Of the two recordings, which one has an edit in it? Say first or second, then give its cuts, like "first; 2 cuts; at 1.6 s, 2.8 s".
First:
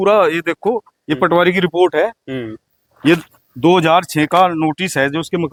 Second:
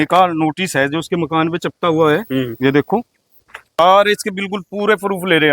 second; 1 cut; at 3.8 s